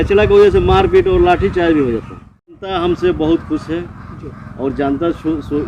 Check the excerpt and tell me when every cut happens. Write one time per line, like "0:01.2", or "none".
0:02.6